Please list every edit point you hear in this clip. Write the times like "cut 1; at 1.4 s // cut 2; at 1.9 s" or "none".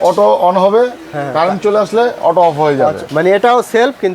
cut 1; at 3.0 s